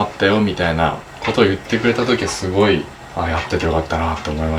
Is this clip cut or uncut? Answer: uncut